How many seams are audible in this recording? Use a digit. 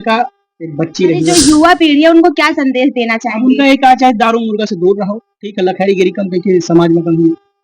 1